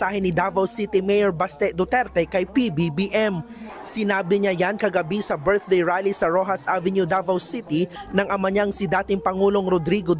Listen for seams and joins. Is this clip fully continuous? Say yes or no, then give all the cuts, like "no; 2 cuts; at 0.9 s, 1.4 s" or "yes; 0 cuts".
no; 1 cut; at 3.4 s